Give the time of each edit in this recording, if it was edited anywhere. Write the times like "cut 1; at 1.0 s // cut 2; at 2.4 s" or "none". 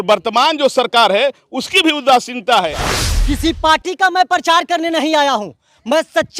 cut 1; at 2.9 s

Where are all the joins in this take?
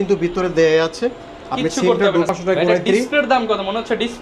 cut 1; at 2.3 s

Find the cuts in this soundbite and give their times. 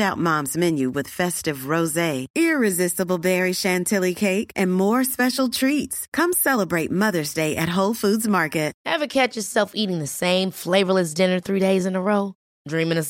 cut 1; at 8.8 s

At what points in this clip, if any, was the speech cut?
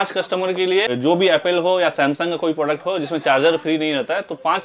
cut 1; at 1.0 s

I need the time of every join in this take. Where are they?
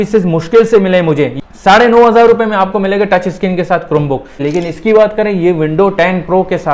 cut 1; at 1.3 s // cut 2; at 4.4 s

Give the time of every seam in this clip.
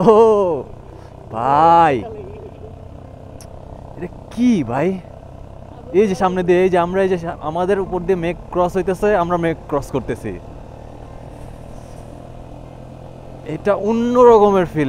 none

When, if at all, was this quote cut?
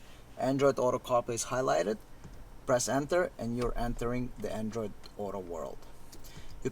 none

